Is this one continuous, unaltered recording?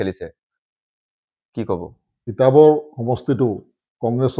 no; 1 cut; at 2.2 s

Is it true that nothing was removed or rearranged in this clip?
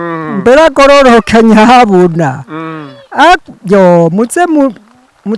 yes; 0 cuts

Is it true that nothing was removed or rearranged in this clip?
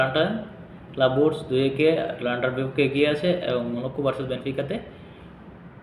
yes; 0 cuts

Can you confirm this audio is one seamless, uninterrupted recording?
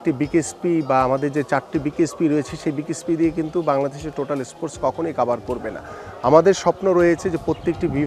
yes; 0 cuts

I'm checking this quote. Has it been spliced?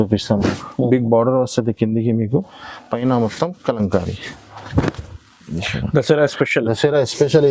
no; 0 cuts

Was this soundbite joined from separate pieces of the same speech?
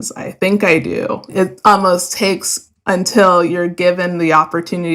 yes; 1 cut; at 1.3 s

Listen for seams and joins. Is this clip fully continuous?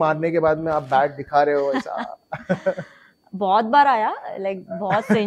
yes; 0 cuts

